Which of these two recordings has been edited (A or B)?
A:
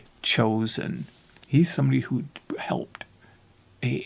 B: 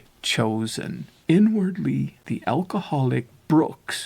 B